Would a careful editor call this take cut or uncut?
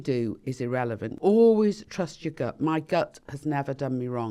cut